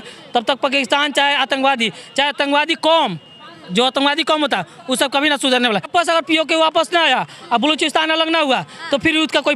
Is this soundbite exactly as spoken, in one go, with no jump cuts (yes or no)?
no